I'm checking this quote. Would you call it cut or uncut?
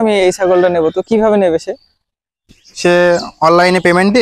uncut